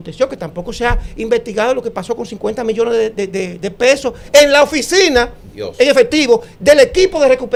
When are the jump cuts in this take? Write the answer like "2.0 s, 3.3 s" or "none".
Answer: none